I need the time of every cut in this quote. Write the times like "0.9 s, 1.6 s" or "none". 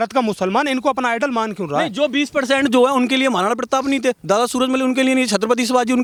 none